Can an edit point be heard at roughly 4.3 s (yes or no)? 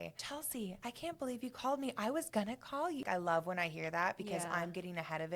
no